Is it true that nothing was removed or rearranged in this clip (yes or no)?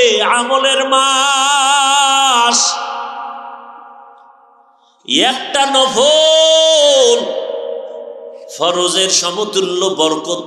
yes